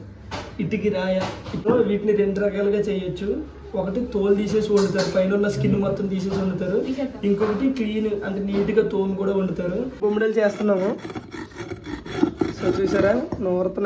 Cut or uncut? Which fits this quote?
cut